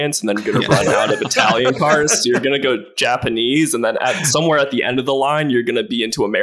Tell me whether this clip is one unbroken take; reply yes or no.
yes